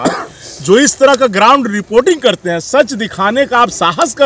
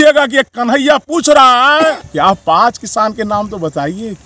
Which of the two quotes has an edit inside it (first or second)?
second